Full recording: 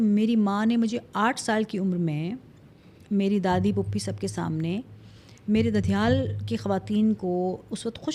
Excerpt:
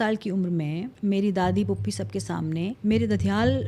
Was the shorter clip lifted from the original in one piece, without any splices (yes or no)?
no